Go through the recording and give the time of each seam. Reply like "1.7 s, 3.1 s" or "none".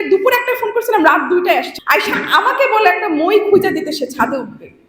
1.8 s